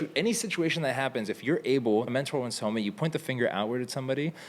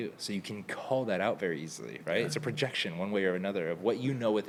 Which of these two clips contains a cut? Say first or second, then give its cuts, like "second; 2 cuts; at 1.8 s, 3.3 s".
first; 1 cut; at 2.1 s